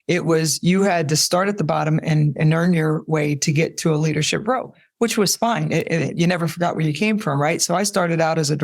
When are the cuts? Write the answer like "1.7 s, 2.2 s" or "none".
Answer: none